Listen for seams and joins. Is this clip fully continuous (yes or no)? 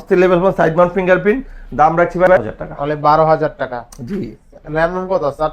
no